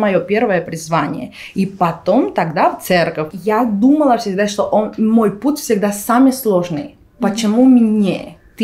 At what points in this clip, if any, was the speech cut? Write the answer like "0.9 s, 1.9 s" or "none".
3.3 s